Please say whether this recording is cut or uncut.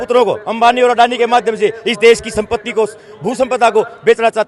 uncut